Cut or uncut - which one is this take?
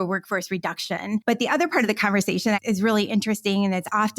cut